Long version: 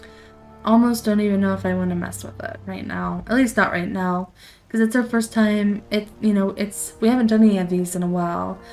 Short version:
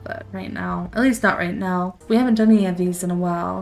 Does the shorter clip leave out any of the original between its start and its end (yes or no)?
yes